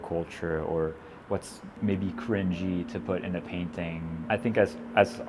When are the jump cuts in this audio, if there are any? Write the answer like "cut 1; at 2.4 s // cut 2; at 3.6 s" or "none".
cut 1; at 1.6 s // cut 2; at 4.1 s